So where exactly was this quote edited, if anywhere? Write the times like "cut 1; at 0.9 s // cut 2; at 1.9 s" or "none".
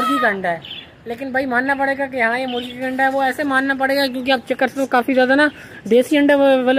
none